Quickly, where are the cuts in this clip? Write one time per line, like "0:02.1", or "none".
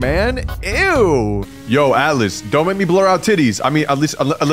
0:01.5